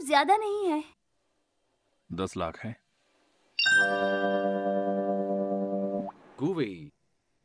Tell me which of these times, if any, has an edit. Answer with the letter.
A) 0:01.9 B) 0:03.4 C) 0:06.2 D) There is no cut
C